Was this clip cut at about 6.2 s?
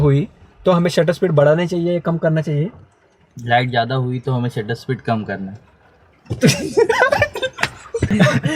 no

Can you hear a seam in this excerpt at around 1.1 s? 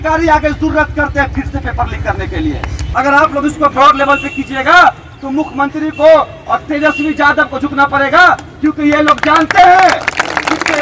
no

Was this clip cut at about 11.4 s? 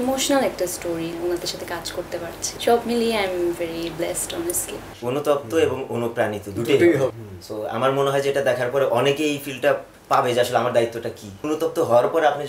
yes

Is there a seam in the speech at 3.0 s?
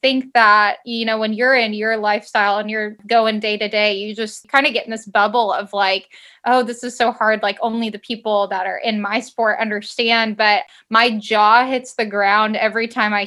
yes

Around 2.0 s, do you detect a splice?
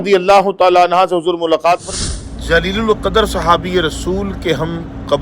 yes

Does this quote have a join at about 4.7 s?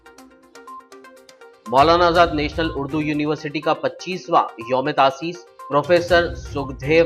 no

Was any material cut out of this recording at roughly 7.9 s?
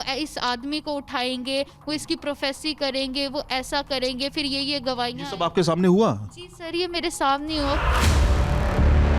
yes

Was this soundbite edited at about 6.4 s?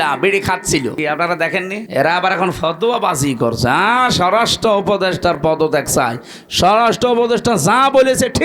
no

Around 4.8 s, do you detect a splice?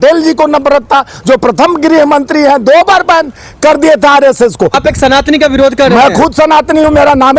yes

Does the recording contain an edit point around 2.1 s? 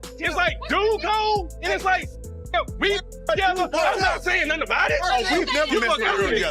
no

